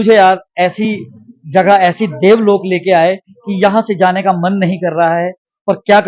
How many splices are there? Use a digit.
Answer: 0